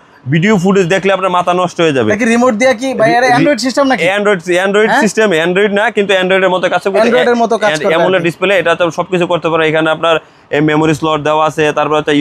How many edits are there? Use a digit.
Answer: 0